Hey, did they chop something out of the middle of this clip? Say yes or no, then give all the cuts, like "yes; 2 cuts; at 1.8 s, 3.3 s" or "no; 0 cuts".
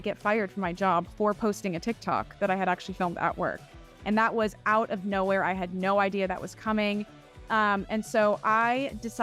no; 0 cuts